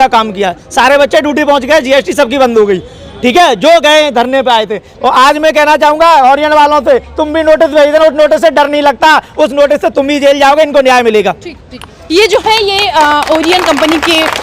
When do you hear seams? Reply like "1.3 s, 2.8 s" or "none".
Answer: none

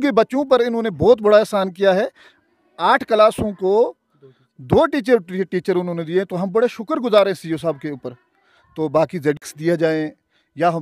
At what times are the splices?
9.4 s

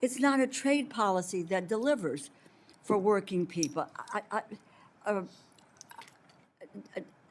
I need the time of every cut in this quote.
none

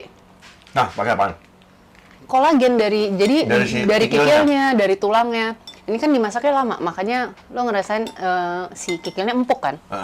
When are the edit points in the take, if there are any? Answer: none

